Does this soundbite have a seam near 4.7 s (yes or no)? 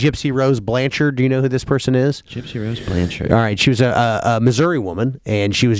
no